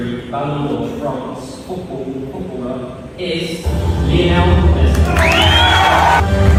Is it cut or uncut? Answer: uncut